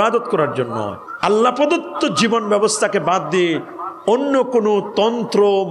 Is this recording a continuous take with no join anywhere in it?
no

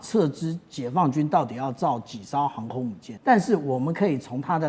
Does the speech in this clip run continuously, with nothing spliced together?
no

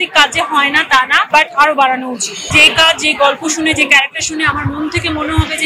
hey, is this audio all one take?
no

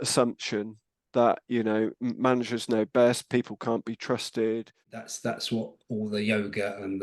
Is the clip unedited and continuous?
no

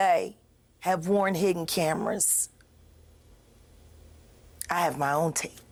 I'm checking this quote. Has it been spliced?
no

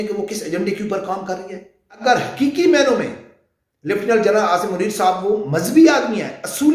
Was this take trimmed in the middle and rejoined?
yes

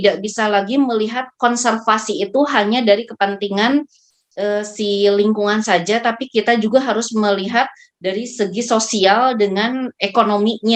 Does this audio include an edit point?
no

